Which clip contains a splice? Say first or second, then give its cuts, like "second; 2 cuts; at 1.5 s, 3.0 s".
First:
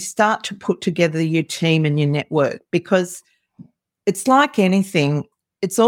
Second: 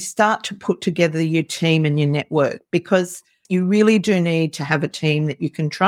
second; 1 cut; at 3.4 s